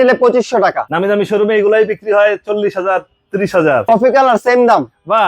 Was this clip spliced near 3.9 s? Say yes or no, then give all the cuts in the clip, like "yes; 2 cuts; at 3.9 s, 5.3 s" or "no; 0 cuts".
yes; 2 cuts; at 0.9 s, 3.9 s